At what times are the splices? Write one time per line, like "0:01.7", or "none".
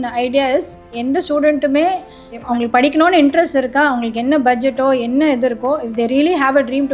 0:02.4